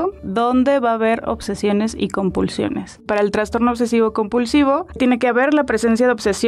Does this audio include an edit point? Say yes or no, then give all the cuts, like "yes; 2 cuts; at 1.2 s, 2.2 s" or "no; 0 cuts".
yes; 1 cut; at 3.0 s